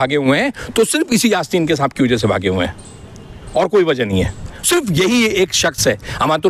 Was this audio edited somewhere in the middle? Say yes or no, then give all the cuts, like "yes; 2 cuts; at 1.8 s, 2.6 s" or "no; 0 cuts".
no; 0 cuts